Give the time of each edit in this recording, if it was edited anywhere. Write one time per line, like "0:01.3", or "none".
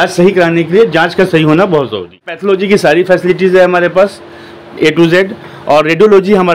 0:02.3